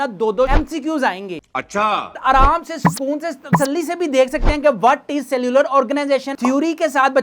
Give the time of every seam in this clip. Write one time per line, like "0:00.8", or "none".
0:02.2
0:06.3